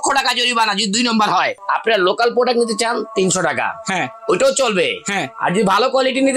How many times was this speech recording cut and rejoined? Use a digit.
1